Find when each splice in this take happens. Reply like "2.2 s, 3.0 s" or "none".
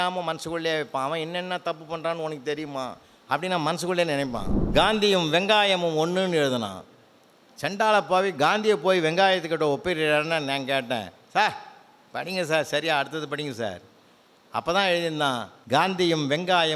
4.5 s, 15.5 s